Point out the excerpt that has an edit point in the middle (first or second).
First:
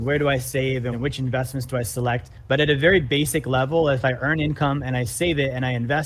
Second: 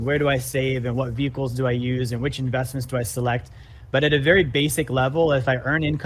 first